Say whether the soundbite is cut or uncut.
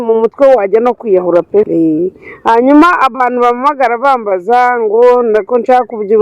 cut